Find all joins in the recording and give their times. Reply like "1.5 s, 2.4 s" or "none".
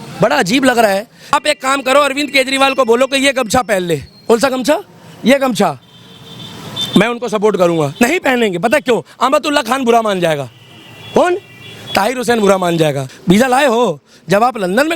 1.3 s, 13.1 s